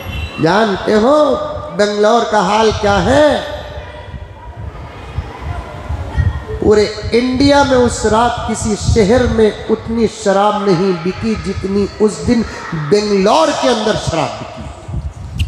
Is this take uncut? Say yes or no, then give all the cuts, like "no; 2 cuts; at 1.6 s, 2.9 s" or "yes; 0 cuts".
yes; 0 cuts